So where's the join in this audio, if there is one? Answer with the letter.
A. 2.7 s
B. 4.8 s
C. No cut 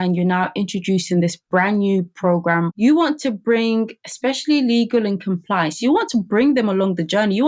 A